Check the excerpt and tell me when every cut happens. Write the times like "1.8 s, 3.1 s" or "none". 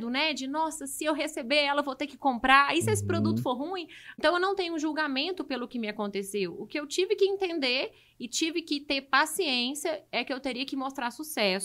4.0 s